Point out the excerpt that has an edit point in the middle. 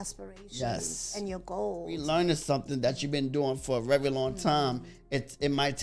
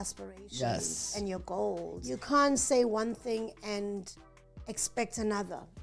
first; 1 cut; at 2.0 s

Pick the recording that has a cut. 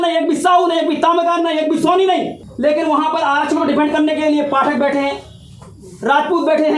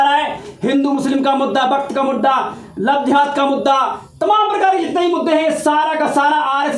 first; 1 cut; at 2.4 s

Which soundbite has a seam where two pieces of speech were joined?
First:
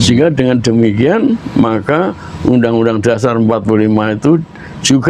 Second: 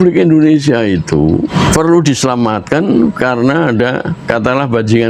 second; 2 cuts; at 1.5 s, 4.3 s

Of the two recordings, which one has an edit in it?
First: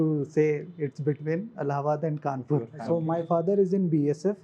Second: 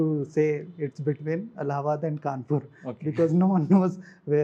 first; 1 cut; at 2.7 s

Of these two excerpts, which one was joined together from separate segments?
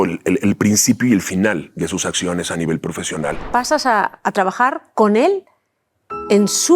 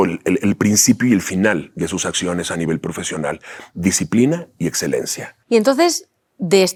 first; 1 cut; at 3.4 s

